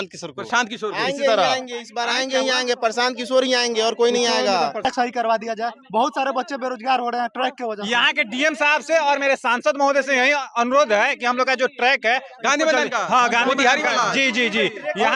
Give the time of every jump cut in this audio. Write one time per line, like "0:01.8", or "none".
0:04.8